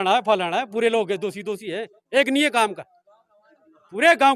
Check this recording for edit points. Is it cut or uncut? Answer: uncut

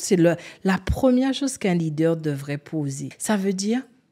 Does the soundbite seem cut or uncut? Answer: cut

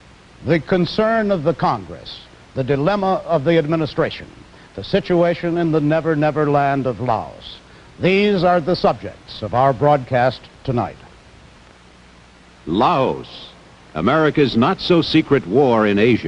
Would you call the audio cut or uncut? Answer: cut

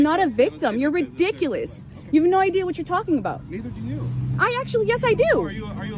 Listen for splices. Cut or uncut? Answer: uncut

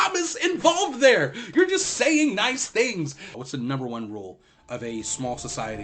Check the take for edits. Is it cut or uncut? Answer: cut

